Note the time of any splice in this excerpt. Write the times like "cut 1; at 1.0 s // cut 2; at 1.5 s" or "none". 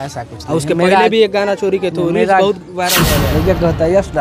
cut 1; at 3.1 s